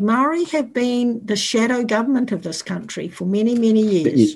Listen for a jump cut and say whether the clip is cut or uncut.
uncut